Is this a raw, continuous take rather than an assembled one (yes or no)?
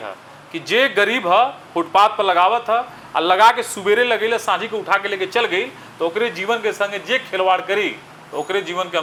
yes